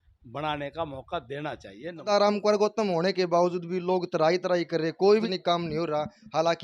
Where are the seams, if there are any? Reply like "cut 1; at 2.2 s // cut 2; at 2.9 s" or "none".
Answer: cut 1; at 2.1 s // cut 2; at 5.3 s